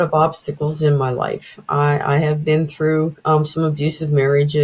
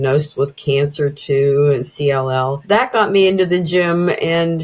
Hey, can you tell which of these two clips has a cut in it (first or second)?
second